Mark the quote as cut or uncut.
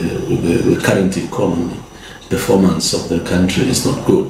uncut